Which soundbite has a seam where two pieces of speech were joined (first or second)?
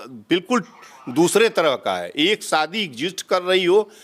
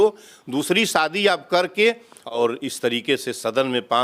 second